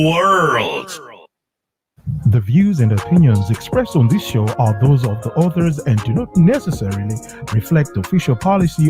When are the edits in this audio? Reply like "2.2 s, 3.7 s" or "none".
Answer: 1.8 s